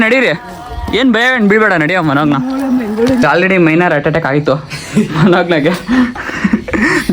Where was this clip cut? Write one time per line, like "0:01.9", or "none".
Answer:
0:03.2